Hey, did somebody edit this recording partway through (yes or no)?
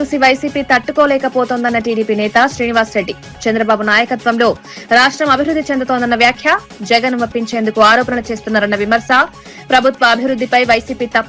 no